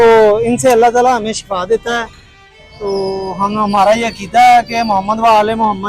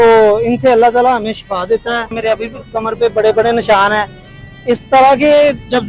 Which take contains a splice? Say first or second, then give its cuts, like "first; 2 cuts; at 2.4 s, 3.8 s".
second; 1 cut; at 2.2 s